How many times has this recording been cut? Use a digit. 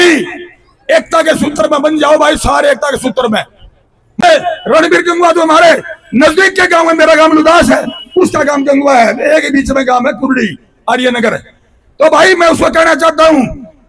1